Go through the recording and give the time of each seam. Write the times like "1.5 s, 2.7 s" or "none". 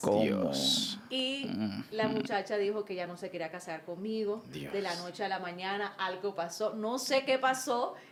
none